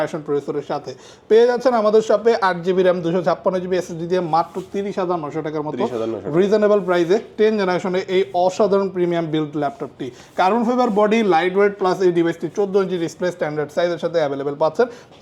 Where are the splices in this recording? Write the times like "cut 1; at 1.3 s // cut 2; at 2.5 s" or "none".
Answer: none